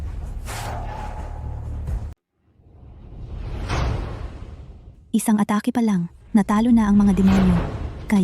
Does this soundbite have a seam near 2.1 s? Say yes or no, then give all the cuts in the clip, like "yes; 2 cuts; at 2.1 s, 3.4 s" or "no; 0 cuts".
yes; 1 cut; at 2.1 s